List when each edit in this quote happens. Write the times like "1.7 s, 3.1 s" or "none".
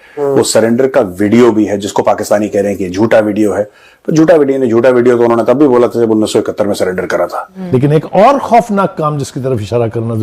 7.5 s

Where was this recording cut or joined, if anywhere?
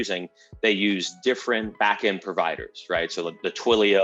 1.7 s

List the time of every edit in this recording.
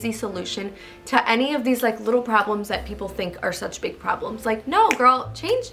none

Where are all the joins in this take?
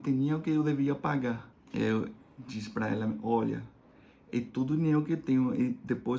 1.5 s

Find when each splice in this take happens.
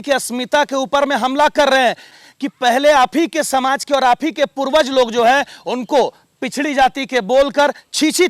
2.1 s

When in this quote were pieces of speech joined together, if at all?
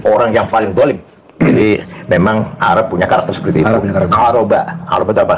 1.3 s

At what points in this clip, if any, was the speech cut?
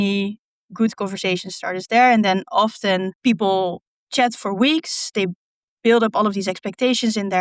3.1 s

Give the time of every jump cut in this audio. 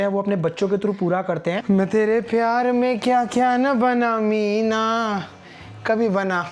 1.6 s

